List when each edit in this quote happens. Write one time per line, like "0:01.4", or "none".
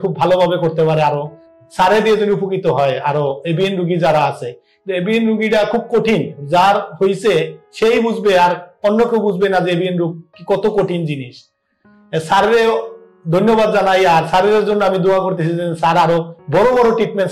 0:01.4